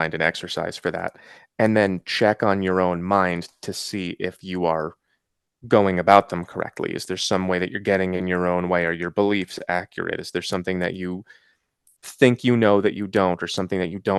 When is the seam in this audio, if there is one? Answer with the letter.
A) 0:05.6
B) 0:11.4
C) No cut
C